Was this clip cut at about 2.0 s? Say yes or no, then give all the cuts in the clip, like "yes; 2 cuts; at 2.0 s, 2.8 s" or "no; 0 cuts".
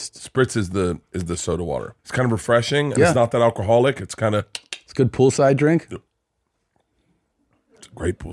yes; 1 cut; at 2.0 s